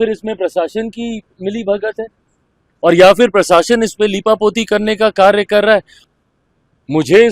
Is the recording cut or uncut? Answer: cut